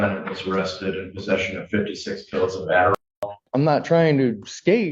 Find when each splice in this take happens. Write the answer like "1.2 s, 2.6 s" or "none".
3.0 s